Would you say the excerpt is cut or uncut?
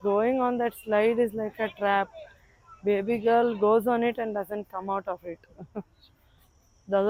uncut